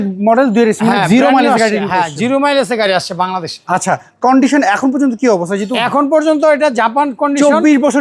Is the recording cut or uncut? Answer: uncut